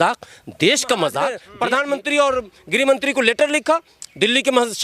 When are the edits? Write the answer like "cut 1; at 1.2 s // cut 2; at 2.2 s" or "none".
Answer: cut 1; at 1.4 s